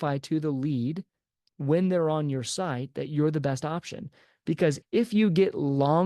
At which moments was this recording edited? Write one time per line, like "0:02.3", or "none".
0:04.8